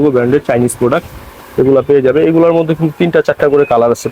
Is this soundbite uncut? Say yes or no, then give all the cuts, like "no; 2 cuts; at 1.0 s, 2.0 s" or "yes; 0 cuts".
yes; 0 cuts